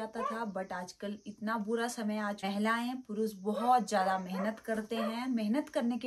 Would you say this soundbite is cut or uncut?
cut